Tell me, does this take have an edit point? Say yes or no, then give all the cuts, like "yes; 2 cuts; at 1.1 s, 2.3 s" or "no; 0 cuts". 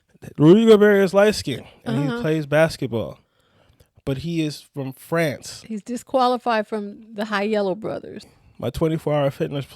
yes; 1 cut; at 8.3 s